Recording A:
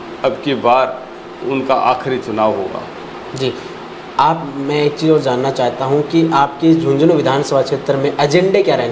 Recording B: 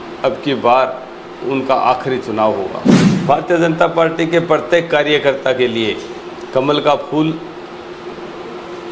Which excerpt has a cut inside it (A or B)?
B